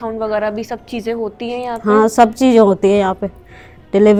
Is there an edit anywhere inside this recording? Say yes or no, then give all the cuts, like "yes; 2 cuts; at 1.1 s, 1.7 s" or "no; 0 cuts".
no; 0 cuts